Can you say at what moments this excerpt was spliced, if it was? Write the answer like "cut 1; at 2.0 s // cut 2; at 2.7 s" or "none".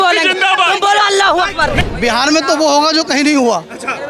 cut 1; at 1.8 s